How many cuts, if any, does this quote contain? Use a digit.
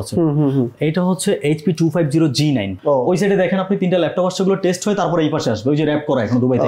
1